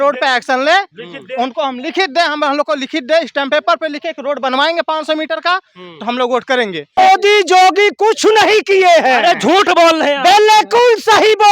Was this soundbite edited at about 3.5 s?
no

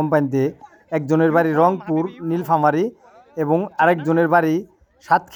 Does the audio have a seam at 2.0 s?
no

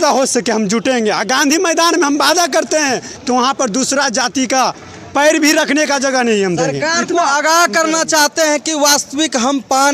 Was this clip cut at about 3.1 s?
yes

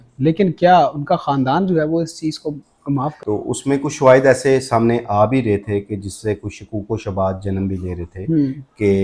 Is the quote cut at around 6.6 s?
no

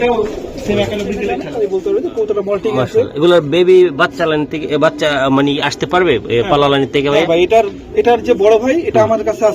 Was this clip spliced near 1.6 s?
yes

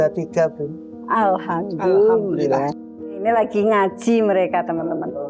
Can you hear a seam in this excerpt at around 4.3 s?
no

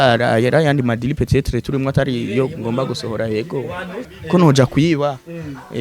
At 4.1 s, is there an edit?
yes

